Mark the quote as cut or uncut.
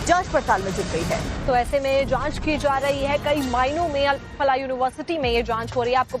cut